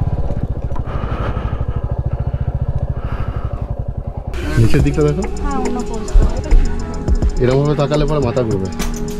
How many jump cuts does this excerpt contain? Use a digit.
1